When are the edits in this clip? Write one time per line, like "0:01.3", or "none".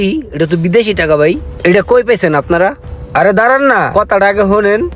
none